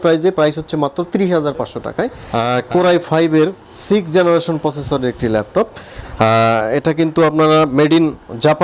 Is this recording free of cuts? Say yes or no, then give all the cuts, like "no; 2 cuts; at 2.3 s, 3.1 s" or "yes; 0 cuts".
no; 1 cut; at 2.2 s